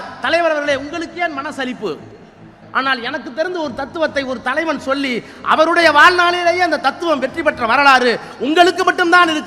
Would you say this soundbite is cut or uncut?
cut